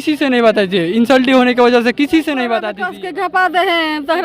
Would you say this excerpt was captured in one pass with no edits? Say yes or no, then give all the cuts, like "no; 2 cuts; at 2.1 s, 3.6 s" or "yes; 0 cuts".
no; 1 cut; at 2.8 s